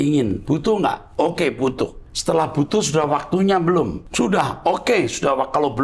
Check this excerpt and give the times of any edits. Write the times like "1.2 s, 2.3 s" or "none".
2.1 s, 4.0 s